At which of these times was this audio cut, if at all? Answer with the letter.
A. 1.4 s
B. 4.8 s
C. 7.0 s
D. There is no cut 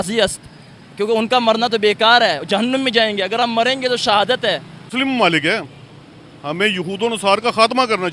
B